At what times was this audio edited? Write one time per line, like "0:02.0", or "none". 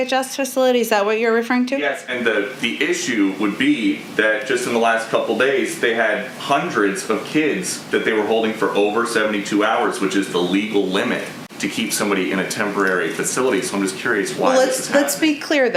none